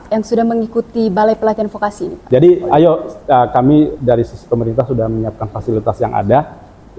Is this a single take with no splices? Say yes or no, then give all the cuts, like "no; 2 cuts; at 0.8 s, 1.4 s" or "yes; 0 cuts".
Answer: no; 1 cut; at 2.2 s